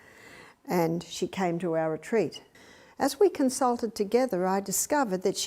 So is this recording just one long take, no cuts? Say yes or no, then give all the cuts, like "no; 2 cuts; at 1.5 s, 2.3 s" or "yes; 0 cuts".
no; 1 cut; at 2.5 s